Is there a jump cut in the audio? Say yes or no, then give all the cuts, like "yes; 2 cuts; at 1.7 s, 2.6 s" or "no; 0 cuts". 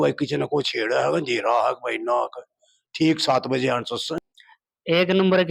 yes; 1 cut; at 4.2 s